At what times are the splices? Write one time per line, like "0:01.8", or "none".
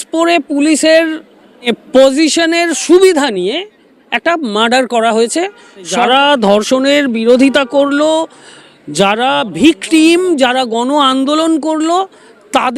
0:01.6
0:06.0